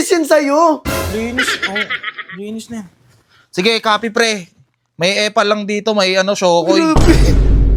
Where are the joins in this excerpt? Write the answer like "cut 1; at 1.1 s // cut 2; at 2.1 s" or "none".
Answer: none